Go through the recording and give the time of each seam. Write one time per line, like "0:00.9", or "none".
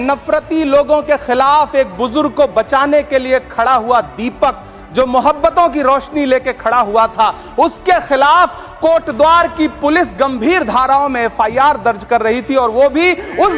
none